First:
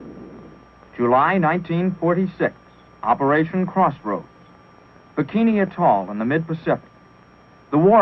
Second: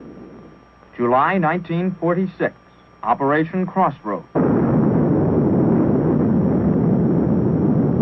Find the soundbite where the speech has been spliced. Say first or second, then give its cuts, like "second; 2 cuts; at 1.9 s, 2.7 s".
first; 1 cut; at 4.4 s